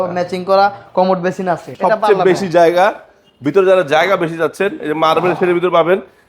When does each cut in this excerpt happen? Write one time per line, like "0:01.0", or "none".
0:01.7